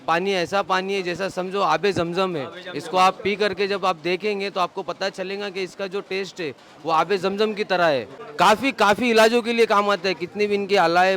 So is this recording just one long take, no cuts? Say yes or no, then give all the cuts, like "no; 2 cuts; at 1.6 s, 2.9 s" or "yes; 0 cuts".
no; 1 cut; at 8.2 s